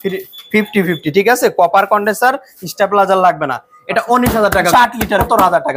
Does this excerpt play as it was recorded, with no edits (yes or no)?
no